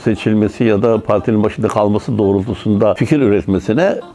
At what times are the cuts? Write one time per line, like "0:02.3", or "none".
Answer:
0:03.0